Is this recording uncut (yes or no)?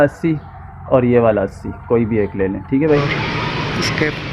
no